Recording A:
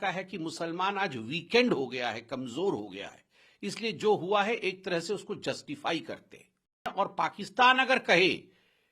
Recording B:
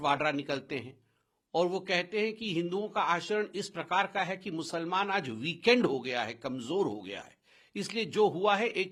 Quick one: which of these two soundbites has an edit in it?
A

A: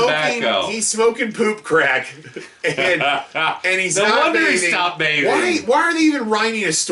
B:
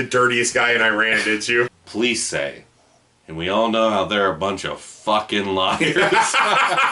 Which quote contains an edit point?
B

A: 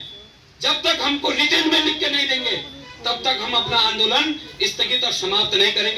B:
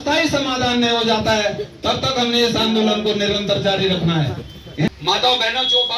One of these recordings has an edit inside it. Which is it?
B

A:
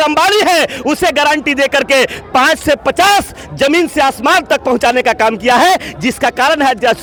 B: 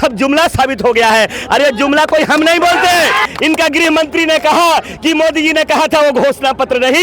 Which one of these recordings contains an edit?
B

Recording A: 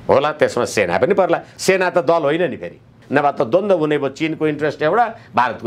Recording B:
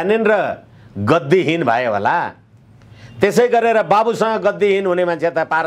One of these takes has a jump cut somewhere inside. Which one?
A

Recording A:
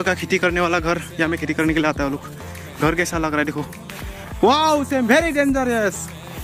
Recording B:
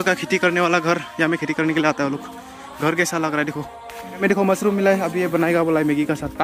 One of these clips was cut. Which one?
B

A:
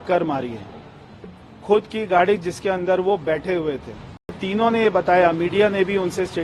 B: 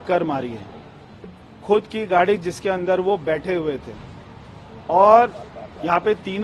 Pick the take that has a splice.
A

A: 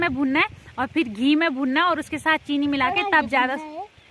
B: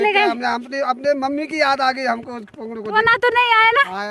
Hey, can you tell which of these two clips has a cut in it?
B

